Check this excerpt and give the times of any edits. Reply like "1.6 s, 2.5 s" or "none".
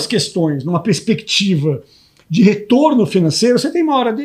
none